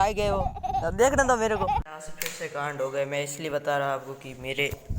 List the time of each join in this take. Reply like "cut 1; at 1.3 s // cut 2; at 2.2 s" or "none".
cut 1; at 1.8 s